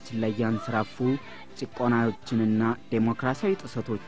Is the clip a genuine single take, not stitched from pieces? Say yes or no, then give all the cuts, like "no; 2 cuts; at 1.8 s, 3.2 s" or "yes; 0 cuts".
no; 1 cut; at 3.1 s